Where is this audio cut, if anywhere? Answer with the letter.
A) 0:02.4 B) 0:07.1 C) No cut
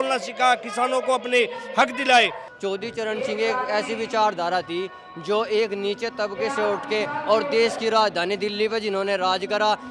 A